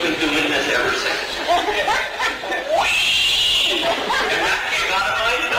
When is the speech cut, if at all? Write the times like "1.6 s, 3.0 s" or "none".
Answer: none

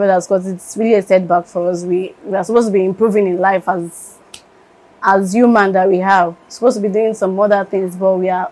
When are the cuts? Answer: none

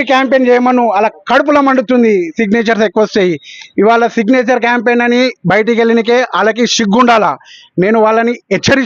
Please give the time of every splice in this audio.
none

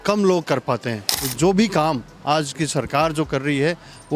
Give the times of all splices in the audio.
1.2 s

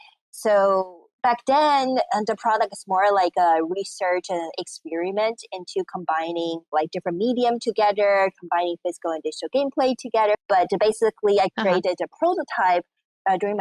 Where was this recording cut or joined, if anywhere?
10.4 s

